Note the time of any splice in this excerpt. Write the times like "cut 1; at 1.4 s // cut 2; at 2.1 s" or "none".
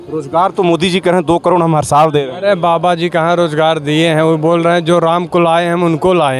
none